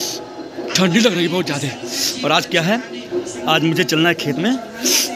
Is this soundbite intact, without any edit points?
yes; 0 cuts

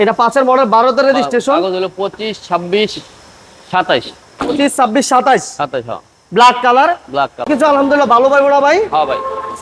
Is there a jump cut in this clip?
yes; 1 cut; at 7.4 s

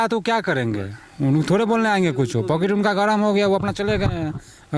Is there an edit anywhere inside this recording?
no; 0 cuts

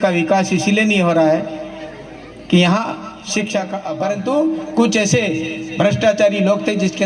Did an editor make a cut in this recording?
yes; 1 cut; at 3.8 s

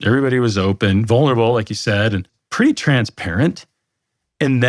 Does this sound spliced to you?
yes; 1 cut; at 2.4 s

